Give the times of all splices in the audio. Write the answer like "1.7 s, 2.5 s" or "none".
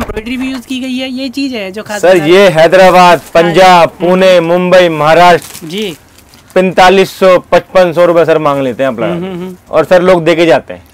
none